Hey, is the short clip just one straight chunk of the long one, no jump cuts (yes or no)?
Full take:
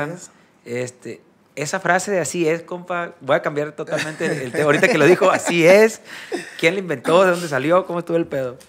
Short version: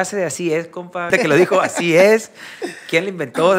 no